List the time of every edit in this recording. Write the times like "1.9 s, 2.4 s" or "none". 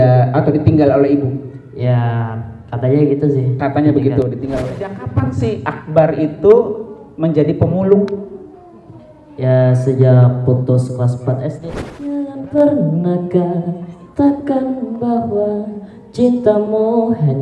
5.0 s, 12.3 s